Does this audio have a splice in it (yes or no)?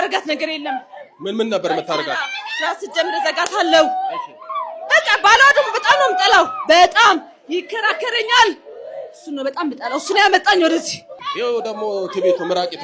yes